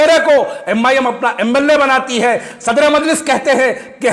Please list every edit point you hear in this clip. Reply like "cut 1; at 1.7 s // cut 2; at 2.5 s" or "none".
none

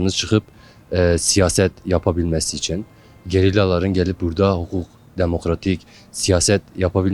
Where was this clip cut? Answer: none

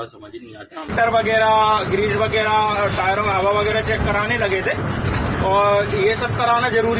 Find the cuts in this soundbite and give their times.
cut 1; at 0.9 s

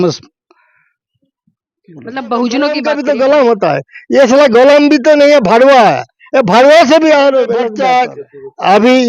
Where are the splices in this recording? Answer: cut 1; at 2.8 s // cut 2; at 7.8 s

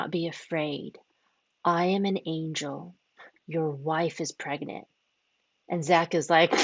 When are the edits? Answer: none

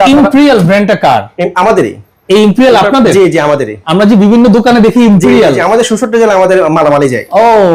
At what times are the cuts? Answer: none

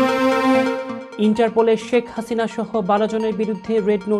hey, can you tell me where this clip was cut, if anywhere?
cut 1; at 0.9 s

